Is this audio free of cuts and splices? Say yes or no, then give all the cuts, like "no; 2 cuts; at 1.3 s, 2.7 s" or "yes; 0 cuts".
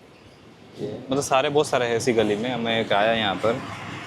yes; 0 cuts